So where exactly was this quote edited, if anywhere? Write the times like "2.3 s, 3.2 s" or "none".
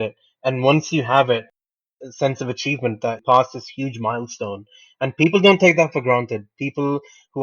1.7 s